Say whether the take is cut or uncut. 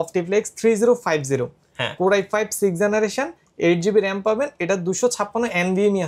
uncut